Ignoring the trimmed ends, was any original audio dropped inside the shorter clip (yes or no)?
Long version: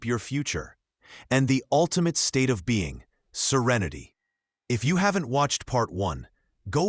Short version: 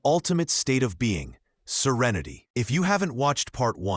yes